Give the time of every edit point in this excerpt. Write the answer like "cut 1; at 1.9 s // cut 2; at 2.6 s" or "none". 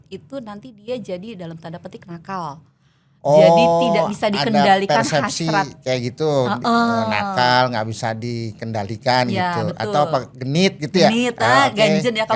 none